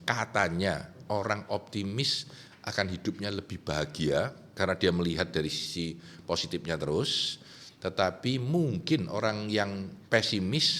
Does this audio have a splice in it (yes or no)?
yes